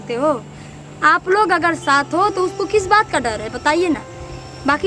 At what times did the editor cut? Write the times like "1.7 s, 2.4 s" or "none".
none